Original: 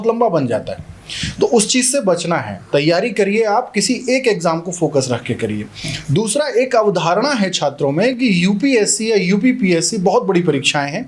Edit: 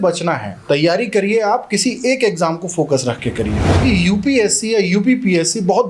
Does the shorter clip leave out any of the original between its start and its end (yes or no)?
yes